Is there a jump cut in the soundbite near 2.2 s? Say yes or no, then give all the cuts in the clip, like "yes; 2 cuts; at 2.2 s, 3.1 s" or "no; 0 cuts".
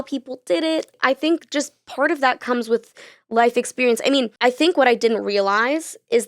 no; 2 cuts; at 0.9 s, 4.3 s